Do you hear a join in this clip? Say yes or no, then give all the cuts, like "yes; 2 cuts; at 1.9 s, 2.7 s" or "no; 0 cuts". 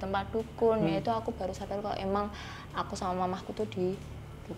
no; 0 cuts